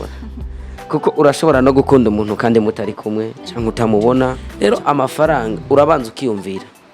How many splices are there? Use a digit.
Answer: 1